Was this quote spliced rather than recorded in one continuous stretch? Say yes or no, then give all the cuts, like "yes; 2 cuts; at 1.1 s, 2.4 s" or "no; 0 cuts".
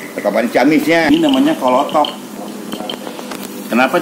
yes; 1 cut; at 1.1 s